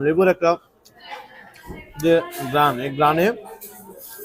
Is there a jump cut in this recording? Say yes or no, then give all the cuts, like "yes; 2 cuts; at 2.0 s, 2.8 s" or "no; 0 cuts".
no; 0 cuts